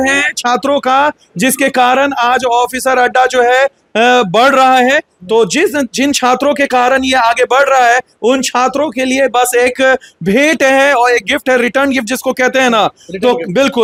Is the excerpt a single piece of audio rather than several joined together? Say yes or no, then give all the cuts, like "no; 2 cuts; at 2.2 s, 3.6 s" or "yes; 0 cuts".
yes; 0 cuts